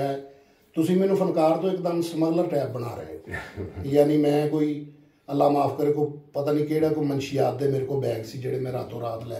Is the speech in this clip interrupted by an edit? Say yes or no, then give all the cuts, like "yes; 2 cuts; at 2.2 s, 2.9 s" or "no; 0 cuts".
no; 0 cuts